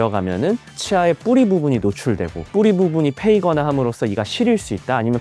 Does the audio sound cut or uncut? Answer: cut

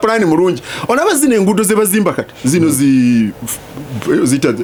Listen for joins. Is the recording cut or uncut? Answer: uncut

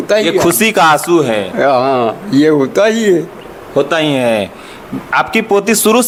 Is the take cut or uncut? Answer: uncut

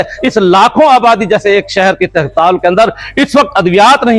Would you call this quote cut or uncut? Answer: uncut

